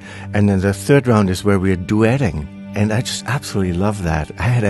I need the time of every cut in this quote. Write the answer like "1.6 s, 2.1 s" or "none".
0.8 s, 1.8 s